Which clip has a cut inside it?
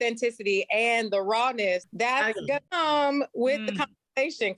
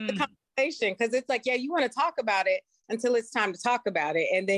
first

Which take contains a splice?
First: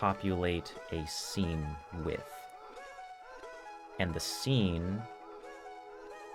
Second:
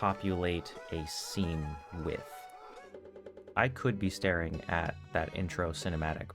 second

